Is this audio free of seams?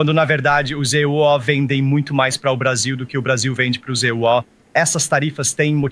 no; 1 cut; at 4.6 s

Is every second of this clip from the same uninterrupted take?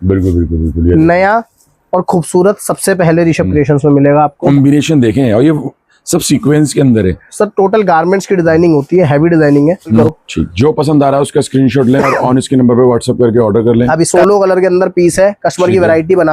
no; 3 cuts; at 4.4 s, 10.0 s, 14.1 s

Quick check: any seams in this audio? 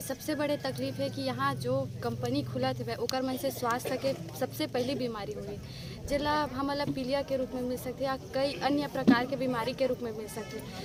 no; 0 cuts

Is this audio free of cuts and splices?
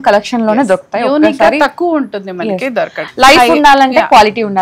no; 1 cut; at 3.0 s

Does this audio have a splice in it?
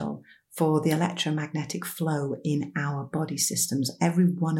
no; 0 cuts

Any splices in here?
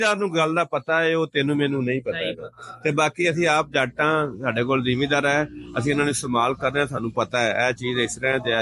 no; 0 cuts

